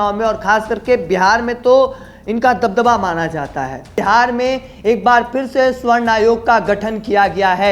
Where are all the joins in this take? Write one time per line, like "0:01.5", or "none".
0:04.0